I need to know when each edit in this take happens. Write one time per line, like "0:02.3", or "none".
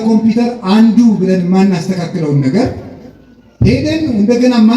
none